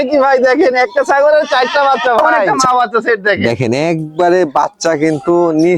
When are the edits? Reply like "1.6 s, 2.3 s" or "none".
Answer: 2.4 s